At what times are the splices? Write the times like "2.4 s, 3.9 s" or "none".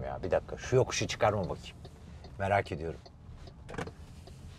none